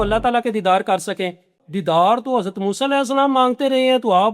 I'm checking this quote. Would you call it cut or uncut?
cut